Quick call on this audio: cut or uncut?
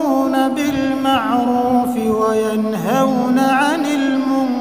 uncut